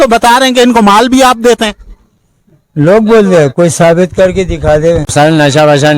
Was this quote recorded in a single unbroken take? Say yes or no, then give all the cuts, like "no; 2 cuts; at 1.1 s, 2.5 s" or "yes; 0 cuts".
no; 1 cut; at 5.1 s